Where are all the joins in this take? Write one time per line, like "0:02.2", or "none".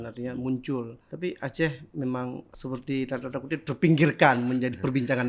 0:01.0
0:02.5